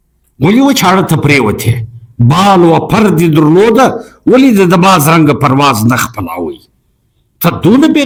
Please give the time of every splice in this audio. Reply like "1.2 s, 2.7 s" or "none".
none